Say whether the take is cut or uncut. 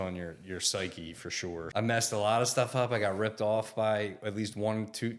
cut